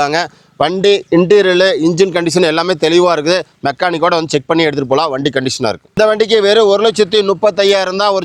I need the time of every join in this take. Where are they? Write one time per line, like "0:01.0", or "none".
0:05.9